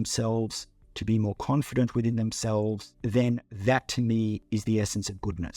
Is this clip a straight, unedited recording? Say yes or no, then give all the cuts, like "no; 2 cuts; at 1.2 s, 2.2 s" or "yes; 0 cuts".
no; 3 cuts; at 2.9 s, 3.5 s, 4.4 s